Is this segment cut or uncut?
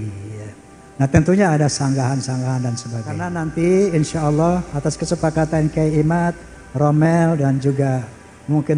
cut